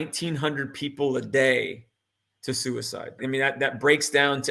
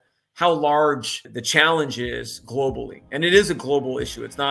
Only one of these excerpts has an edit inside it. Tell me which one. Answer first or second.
second